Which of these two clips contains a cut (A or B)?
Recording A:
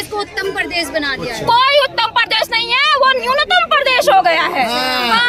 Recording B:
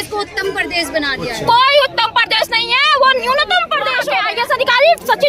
B